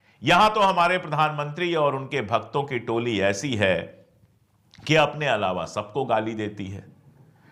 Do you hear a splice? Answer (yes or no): no